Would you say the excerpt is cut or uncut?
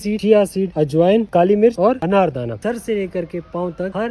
cut